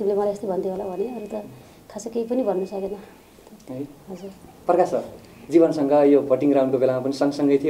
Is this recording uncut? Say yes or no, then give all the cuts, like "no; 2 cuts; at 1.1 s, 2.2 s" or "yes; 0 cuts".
yes; 0 cuts